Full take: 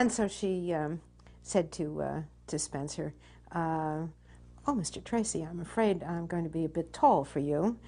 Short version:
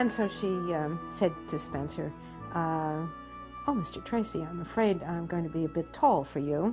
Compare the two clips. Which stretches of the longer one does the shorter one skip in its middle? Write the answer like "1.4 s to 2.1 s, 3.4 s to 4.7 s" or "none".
1.3 s to 2.3 s